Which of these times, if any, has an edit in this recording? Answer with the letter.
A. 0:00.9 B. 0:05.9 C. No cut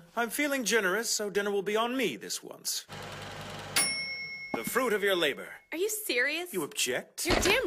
A